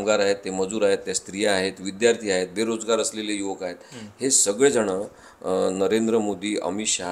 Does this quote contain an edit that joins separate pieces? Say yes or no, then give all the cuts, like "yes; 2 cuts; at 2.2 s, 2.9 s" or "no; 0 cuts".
no; 0 cuts